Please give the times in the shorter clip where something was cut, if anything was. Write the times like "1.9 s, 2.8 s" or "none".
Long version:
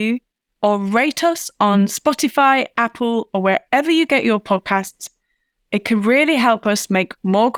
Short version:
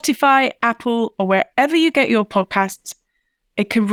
none